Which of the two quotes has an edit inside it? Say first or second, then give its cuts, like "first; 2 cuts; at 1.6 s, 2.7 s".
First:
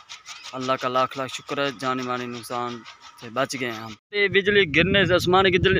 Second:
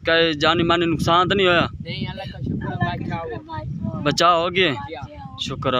first; 1 cut; at 4.0 s